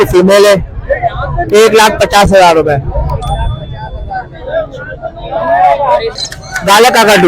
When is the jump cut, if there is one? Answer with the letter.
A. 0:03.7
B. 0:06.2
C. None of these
B